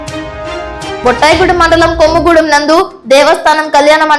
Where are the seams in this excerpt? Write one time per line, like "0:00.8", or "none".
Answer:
none